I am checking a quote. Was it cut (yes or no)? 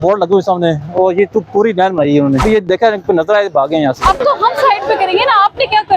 yes